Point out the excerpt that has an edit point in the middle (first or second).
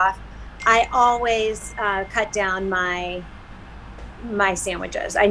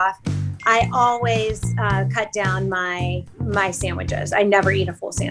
second